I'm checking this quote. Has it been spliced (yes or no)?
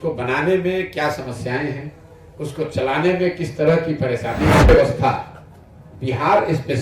yes